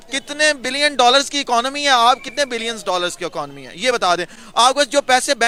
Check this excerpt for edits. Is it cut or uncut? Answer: uncut